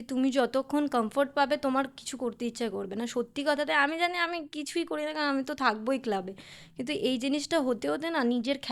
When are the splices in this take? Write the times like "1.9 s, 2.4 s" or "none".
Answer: none